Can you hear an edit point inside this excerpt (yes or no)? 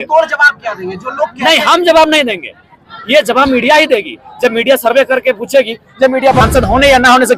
yes